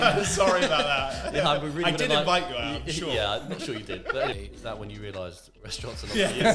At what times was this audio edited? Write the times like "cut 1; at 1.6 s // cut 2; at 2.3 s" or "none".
cut 1; at 4.3 s